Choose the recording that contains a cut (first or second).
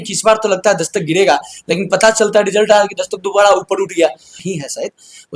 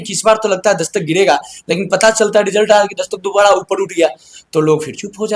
first